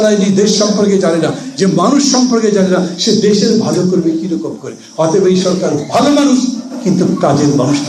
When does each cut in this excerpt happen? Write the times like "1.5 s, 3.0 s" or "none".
none